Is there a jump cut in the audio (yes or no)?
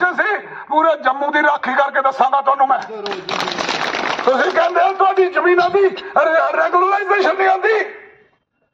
yes